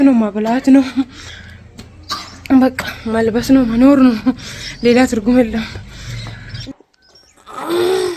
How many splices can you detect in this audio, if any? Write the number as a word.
one